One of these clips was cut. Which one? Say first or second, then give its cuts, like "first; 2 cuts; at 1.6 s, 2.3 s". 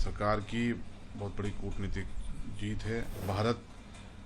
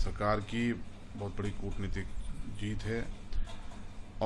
first; 1 cut; at 3.2 s